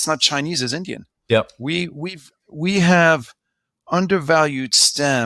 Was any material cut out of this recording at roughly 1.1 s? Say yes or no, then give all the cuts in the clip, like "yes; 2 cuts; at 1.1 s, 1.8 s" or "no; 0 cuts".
yes; 1 cut; at 1.1 s